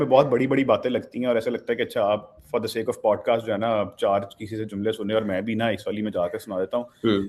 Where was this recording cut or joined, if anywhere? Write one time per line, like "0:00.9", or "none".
none